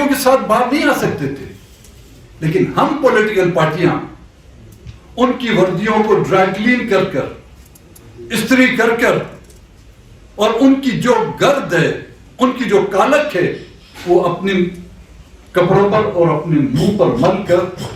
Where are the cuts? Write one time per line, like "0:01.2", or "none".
none